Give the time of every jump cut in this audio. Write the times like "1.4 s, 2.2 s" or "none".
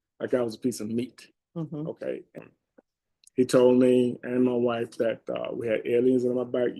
2.4 s